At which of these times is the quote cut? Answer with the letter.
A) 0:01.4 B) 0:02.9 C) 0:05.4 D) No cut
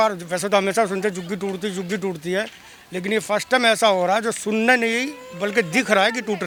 D